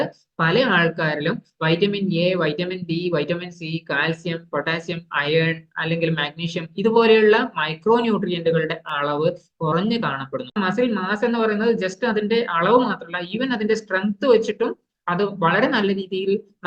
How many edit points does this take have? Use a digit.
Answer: 1